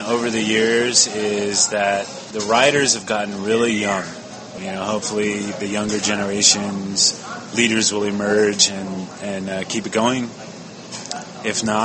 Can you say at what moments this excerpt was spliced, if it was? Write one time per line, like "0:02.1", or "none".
0:04.6